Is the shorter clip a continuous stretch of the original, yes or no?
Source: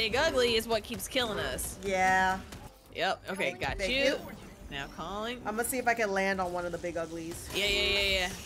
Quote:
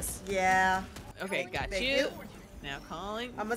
no